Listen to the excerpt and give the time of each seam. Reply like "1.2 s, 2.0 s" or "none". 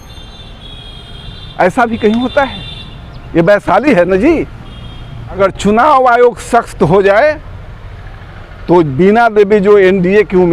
5.4 s